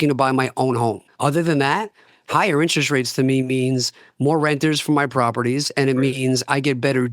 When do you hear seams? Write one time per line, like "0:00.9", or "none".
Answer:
0:01.1